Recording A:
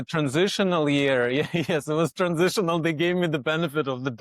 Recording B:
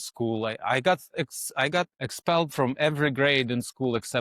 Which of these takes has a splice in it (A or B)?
B